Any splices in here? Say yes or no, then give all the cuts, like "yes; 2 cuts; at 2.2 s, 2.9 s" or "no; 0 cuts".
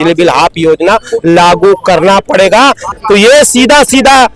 yes; 1 cut; at 2.9 s